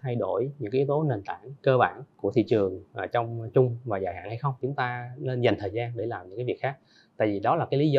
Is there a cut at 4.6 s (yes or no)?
yes